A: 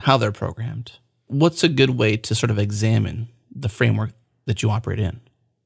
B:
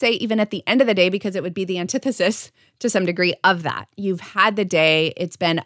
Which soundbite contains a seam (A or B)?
A